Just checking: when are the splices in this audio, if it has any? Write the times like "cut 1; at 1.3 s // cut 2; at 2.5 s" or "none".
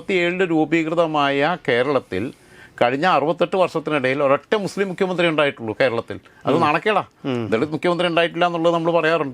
none